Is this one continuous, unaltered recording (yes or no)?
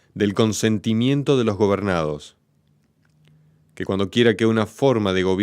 no